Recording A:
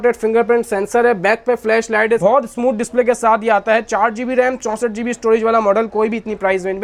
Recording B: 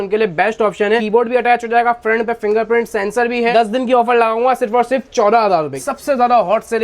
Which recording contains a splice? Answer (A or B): B